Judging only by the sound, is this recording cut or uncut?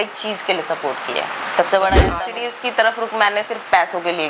cut